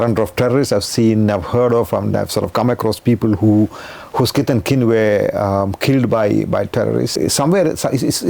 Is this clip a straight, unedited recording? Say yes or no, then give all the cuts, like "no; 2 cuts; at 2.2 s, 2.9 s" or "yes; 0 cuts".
no; 1 cut; at 7.2 s